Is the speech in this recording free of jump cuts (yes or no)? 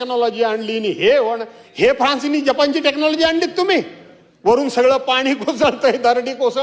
yes